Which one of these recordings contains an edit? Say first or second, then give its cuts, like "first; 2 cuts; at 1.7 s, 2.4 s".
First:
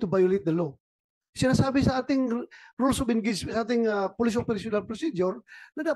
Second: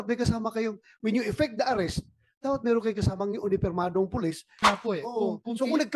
second; 1 cut; at 4.6 s